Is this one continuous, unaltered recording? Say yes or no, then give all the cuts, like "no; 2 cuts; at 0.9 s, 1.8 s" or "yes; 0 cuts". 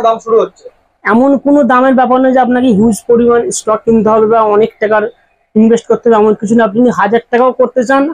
yes; 0 cuts